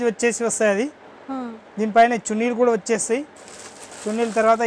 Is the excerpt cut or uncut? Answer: uncut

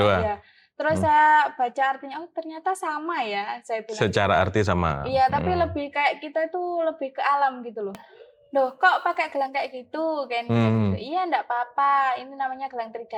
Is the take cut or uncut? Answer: cut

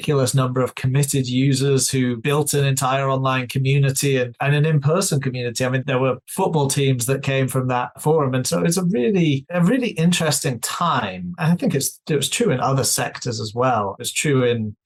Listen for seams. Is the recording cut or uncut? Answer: uncut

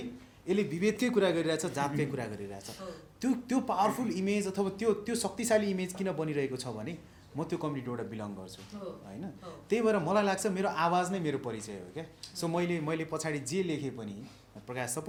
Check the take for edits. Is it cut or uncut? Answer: uncut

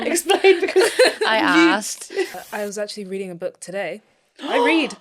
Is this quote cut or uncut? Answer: cut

